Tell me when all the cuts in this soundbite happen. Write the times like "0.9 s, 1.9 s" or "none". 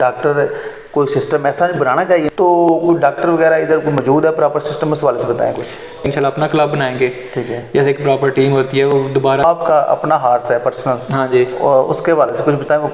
2.3 s, 6.0 s, 9.4 s